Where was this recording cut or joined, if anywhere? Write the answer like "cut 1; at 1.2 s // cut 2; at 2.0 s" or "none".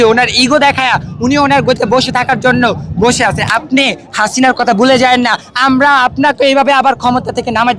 cut 1; at 3.4 s

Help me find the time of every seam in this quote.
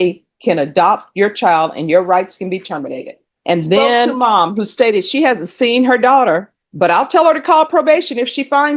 cut 1; at 4.1 s

